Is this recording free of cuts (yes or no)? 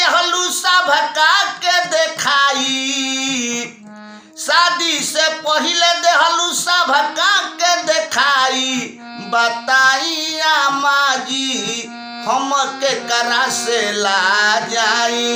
yes